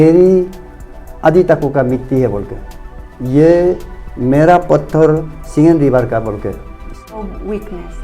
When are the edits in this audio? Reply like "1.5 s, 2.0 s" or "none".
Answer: 6.9 s

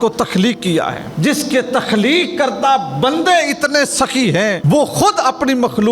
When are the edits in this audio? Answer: 1.0 s, 4.6 s

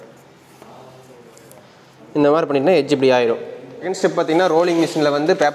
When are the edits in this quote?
3.9 s

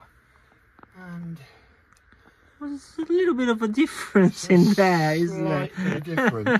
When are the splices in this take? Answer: none

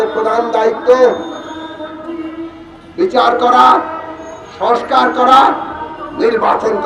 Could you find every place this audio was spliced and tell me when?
none

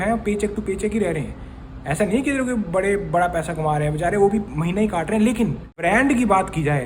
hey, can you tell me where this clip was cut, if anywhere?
5.8 s

